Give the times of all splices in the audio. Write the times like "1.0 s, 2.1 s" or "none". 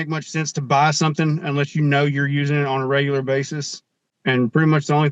4.1 s